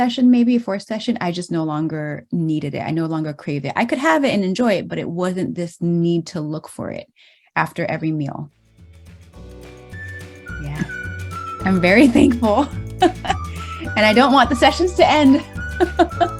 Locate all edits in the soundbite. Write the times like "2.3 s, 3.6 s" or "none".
none